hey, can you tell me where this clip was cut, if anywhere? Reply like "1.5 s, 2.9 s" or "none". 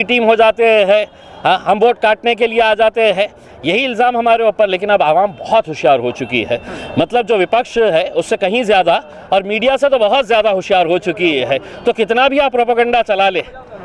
none